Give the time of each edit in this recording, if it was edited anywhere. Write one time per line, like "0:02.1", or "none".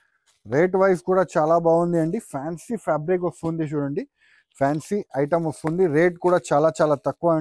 none